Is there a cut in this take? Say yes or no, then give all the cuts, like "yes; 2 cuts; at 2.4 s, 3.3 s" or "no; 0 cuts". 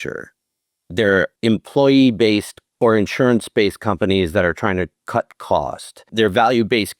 yes; 3 cuts; at 1.3 s, 2.6 s, 6.1 s